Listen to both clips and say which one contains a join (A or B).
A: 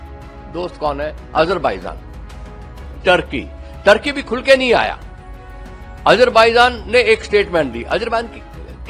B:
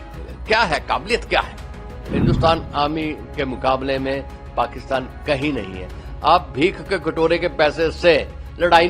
B